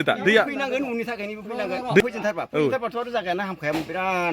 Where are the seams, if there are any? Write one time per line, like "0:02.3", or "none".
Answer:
0:02.0